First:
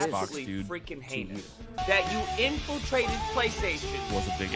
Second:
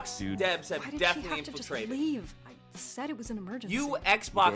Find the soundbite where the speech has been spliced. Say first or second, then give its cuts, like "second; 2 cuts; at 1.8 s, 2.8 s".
first; 1 cut; at 1.8 s